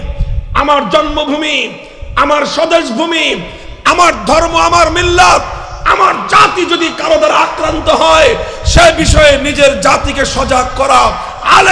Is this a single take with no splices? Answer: yes; 0 cuts

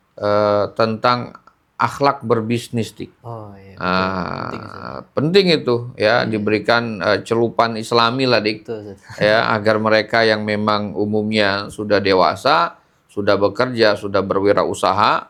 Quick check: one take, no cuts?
yes; 0 cuts

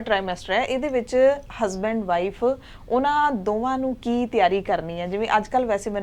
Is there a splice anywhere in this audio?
no; 0 cuts

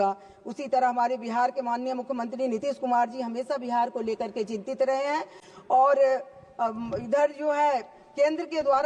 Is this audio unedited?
yes; 0 cuts

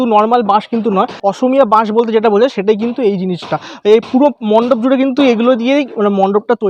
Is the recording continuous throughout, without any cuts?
no; 1 cut; at 1.2 s

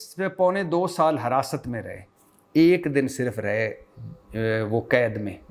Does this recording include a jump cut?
no; 0 cuts

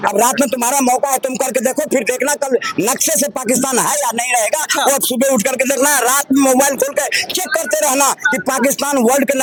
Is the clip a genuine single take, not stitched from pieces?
yes; 0 cuts

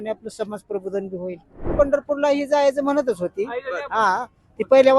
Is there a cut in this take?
yes; 1 cut; at 1.7 s

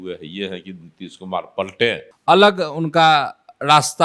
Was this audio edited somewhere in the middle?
yes; 1 cut; at 2.1 s

